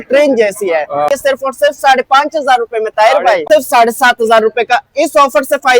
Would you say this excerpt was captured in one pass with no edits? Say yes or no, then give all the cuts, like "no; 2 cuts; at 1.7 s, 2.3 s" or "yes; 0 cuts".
no; 2 cuts; at 1.1 s, 3.4 s